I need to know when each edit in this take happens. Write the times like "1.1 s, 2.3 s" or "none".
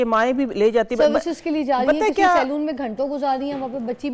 none